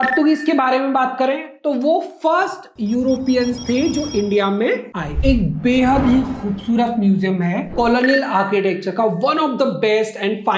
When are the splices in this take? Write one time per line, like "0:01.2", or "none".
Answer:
0:05.2
0:07.7